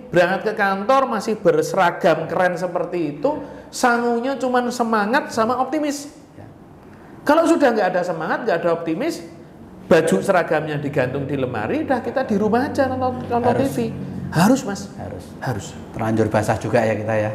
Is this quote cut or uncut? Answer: uncut